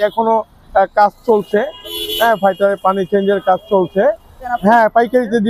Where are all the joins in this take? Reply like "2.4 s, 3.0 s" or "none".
4.5 s